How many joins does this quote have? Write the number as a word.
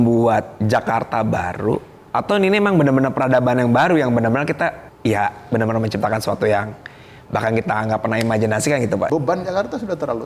three